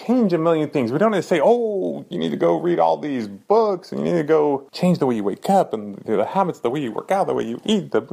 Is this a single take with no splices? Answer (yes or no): no